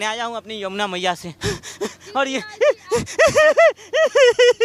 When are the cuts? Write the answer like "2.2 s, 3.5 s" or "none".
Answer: 1.3 s